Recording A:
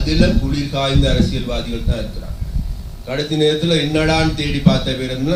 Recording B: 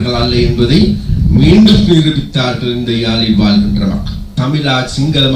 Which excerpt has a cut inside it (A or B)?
B